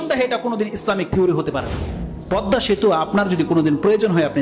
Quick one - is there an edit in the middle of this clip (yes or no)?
yes